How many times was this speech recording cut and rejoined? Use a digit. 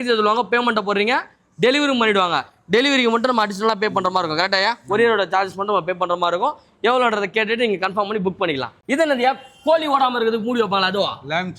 0